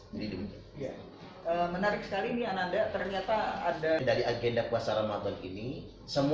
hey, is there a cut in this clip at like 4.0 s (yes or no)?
yes